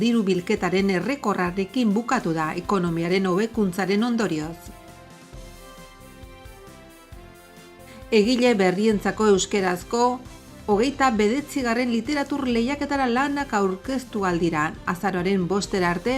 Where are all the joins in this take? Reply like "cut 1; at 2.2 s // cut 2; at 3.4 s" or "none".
none